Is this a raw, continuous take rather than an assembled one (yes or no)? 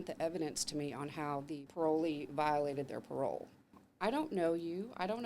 no